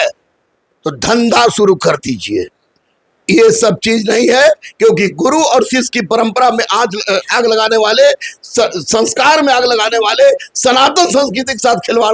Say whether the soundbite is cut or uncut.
uncut